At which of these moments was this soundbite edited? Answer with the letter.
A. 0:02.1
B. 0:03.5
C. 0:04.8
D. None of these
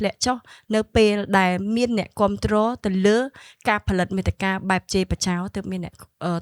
D